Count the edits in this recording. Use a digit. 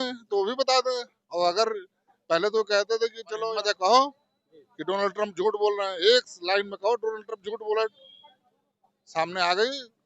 1